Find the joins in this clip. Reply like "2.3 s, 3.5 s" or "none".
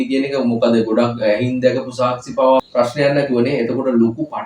2.6 s